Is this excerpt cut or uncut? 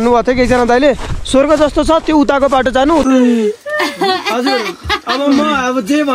cut